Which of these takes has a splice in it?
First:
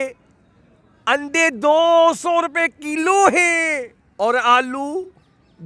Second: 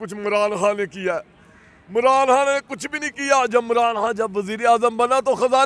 first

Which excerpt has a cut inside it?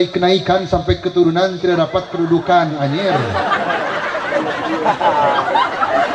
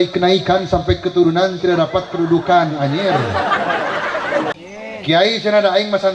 second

